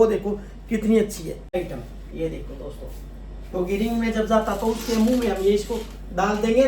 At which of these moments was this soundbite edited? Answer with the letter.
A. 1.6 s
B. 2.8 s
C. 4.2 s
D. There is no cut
A